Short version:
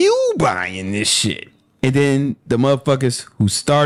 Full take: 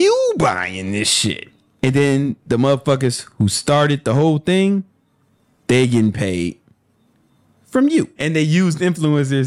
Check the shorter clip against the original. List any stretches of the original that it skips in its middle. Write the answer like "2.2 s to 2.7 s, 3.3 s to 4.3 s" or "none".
none